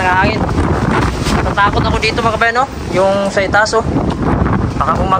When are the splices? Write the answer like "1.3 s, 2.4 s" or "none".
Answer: none